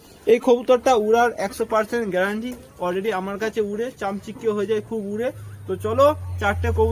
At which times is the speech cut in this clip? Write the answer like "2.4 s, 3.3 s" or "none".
none